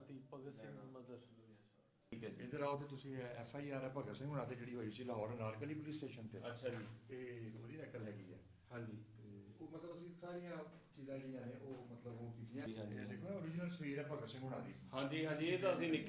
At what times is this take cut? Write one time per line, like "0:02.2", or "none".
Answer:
0:02.2
0:12.7